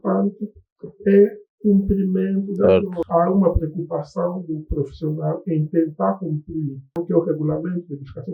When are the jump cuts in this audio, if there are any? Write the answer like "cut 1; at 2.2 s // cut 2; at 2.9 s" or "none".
cut 1; at 2.6 s // cut 2; at 7.0 s